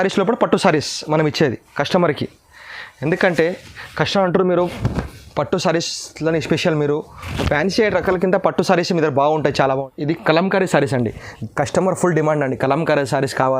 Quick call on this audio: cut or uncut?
cut